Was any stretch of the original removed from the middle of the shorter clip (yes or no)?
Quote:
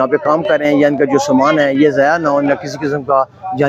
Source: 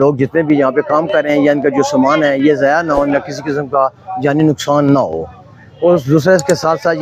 no